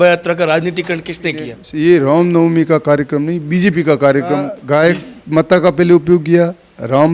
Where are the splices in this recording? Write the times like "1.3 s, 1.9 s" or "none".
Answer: 1.6 s, 4.6 s